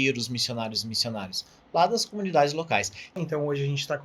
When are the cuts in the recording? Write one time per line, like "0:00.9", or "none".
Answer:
0:03.2